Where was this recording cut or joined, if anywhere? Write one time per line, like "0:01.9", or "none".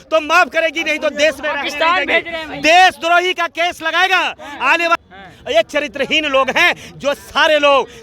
0:05.0